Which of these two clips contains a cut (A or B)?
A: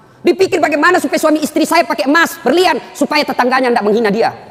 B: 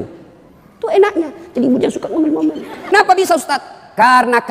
B